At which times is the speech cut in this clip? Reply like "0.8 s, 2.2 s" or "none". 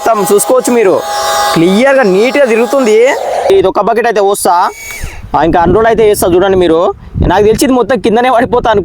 3.5 s